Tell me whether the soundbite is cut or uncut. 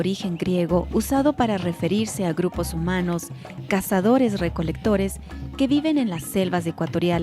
uncut